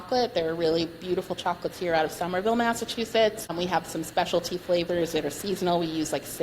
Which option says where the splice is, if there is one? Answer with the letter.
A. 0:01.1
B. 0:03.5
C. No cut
B